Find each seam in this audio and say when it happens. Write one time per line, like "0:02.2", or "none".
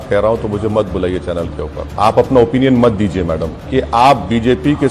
0:01.9
0:03.5